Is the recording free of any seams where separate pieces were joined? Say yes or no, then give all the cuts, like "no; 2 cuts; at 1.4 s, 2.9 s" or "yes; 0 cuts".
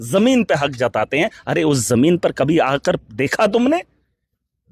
yes; 0 cuts